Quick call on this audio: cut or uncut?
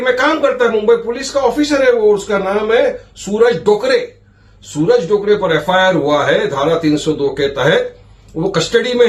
uncut